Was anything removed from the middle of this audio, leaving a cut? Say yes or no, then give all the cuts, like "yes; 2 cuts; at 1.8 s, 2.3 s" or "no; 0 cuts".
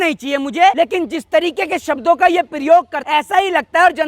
yes; 2 cuts; at 0.7 s, 3.0 s